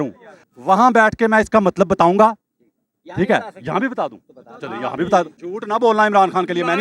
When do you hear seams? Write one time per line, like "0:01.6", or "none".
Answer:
0:05.3